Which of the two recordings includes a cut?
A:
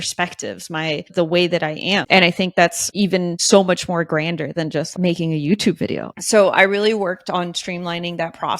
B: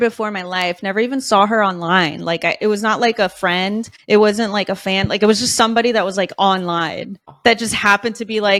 A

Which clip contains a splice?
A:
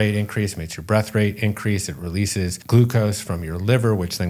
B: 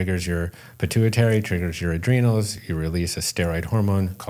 A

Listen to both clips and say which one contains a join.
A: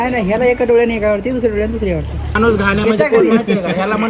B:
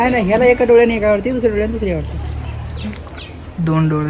A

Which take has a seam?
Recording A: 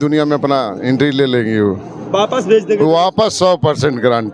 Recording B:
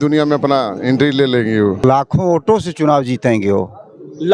B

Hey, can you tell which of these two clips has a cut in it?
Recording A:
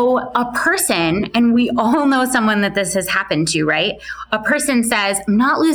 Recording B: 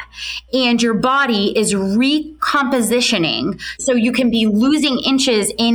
B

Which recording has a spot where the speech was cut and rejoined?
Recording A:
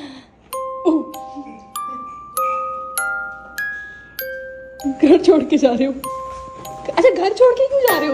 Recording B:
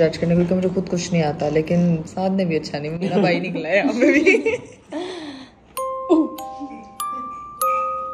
A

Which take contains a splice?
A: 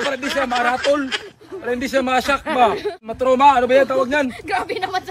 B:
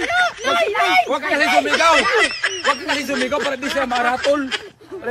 A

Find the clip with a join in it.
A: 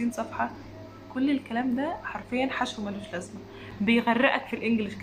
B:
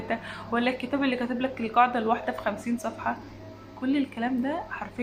A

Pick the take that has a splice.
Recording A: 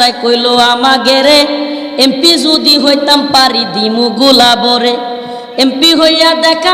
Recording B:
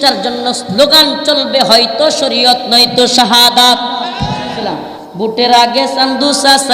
B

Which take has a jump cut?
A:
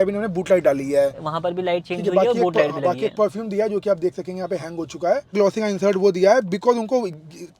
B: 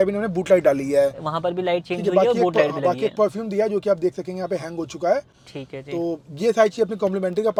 A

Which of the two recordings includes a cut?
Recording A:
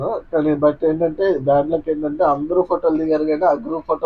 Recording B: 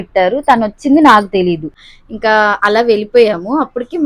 B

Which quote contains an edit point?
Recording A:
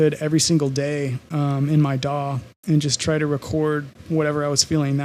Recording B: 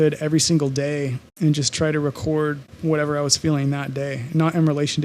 B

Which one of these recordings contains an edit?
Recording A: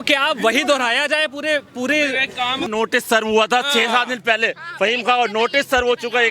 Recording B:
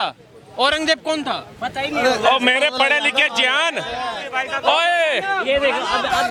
A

